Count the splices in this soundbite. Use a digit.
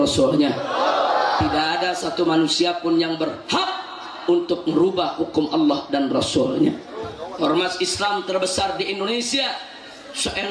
1